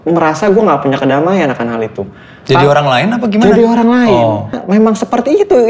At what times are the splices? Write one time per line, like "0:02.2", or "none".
0:04.6